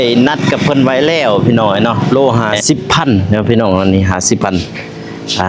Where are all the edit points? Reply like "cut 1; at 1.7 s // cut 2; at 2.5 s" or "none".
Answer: cut 1; at 2.0 s